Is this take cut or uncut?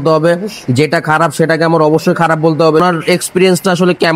cut